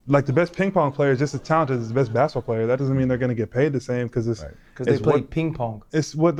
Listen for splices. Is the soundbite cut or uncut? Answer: uncut